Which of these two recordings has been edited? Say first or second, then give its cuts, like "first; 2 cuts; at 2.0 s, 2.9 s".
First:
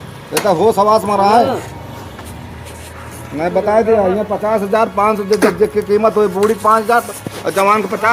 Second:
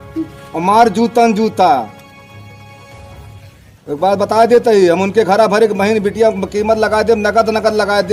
first; 1 cut; at 2.0 s